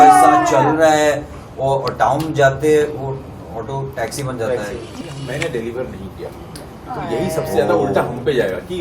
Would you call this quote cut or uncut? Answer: cut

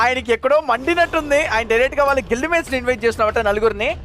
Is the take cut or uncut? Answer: uncut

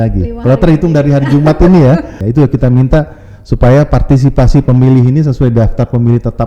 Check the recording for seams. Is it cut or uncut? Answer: cut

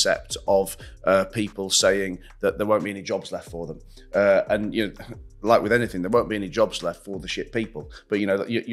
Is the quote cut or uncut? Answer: uncut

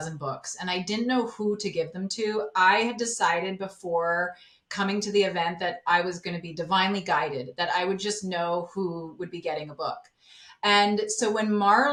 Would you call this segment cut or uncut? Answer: uncut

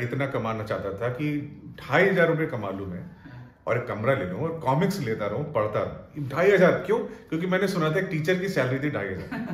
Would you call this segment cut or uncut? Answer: uncut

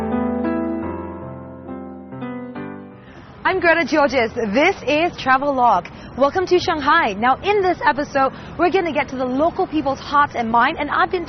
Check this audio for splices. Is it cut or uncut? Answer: uncut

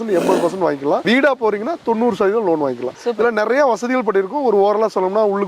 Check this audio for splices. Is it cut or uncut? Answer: uncut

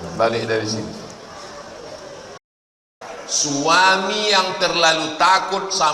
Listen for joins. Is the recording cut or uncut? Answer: cut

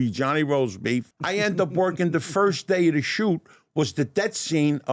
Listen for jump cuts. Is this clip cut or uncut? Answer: cut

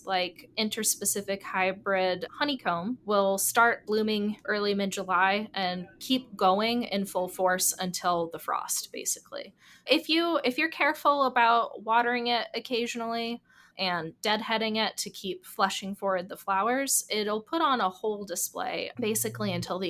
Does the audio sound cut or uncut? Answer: cut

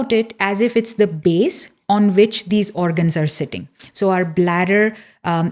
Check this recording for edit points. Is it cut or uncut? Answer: uncut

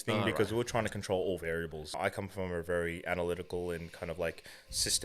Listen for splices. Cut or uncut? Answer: cut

